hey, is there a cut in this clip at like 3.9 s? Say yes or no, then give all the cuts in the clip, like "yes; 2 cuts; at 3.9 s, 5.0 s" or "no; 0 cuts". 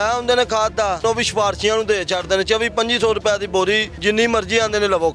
yes; 2 cuts; at 1.0 s, 3.9 s